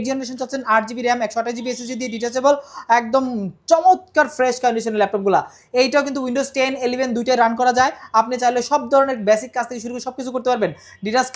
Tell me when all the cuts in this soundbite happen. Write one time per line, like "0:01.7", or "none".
none